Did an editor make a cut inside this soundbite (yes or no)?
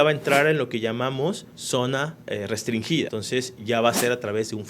yes